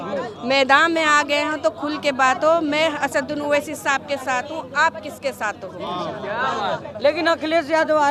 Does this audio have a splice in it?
no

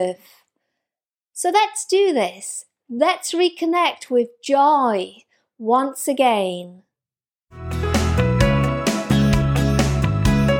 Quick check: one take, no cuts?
no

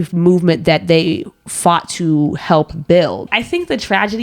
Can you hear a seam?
yes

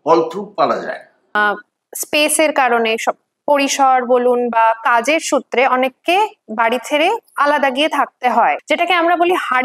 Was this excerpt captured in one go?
no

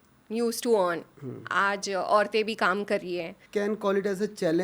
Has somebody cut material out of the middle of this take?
yes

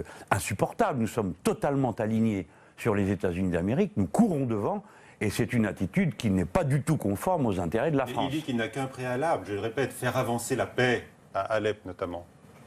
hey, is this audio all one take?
yes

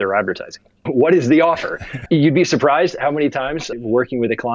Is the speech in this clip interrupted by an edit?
yes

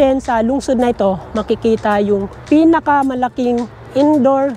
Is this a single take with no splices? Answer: yes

